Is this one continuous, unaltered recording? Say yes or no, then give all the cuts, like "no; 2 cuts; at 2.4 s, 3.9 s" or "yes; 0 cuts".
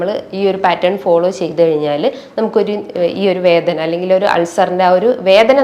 yes; 0 cuts